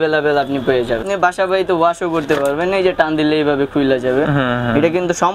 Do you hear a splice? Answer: yes; 1 cut; at 1.0 s

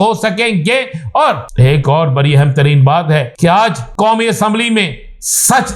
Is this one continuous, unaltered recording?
no; 2 cuts; at 1.5 s, 3.6 s

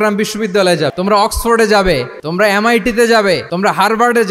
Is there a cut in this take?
yes; 3 cuts; at 0.9 s, 2.2 s, 3.5 s

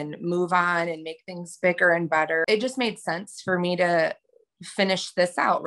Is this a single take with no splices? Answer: no; 1 cut; at 2.4 s

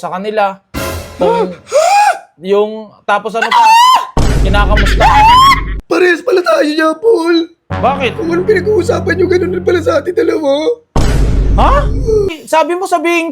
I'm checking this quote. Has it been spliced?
yes; 2 cuts; at 5.7 s, 12.3 s

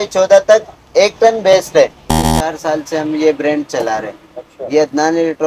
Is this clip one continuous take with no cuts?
no; 1 cut; at 2.3 s

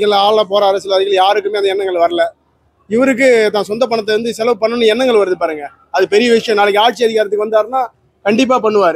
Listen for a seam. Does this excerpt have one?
no; 0 cuts

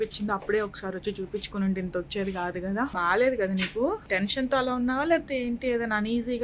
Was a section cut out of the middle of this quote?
yes; 2 cuts; at 3.0 s, 4.0 s

